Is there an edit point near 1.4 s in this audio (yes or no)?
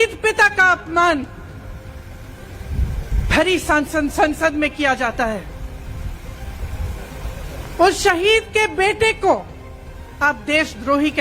no